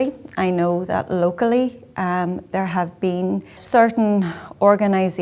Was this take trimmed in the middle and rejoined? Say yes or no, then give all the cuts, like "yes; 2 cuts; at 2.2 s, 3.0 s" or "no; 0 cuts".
yes; 1 cut; at 3.6 s